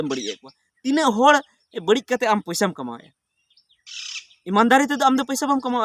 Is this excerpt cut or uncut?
uncut